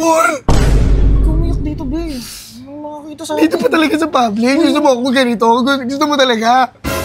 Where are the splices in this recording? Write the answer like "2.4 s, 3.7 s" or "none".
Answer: none